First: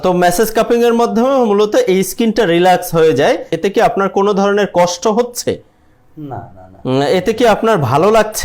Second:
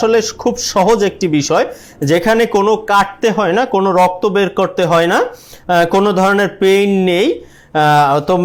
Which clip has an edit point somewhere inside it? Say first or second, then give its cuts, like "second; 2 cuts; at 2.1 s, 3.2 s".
first; 1 cut; at 3.5 s